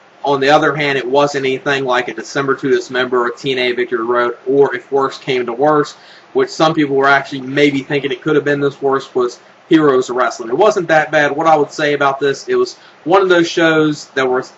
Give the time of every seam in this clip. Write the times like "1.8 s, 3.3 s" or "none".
11.7 s